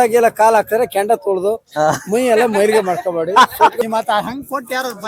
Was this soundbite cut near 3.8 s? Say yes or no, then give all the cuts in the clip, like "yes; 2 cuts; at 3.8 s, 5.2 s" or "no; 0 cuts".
yes; 1 cut; at 3.8 s